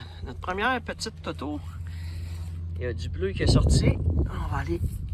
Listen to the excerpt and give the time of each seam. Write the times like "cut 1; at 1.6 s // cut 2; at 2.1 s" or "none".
none